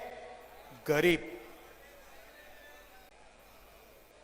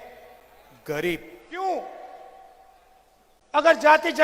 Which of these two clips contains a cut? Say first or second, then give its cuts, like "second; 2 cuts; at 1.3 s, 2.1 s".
second; 1 cut; at 1.4 s